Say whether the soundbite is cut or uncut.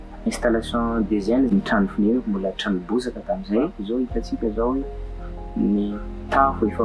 cut